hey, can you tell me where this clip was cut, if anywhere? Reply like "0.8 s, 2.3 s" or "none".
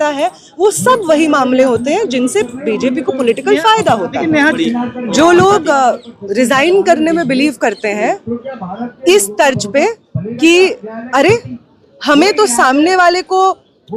4.6 s

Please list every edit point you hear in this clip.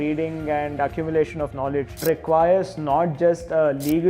2.0 s

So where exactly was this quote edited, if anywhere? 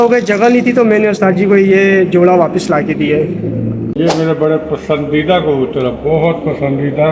3.9 s

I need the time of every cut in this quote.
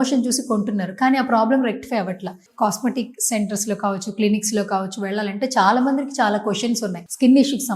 2.5 s

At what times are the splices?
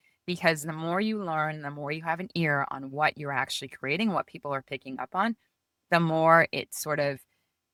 none

